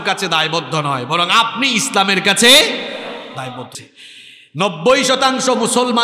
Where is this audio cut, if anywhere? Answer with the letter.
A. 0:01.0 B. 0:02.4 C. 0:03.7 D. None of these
C